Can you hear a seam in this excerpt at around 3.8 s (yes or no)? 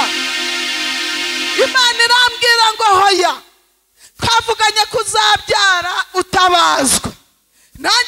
no